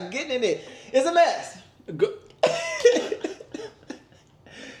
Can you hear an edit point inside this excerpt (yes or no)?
no